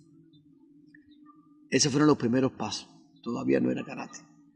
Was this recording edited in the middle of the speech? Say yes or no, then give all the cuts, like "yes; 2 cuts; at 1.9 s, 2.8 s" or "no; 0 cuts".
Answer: no; 0 cuts